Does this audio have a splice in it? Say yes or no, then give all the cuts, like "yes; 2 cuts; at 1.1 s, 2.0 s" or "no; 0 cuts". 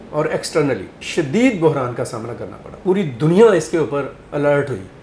yes; 2 cuts; at 1.0 s, 2.7 s